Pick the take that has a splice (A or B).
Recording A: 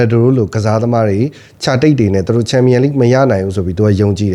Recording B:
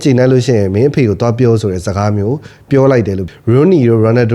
B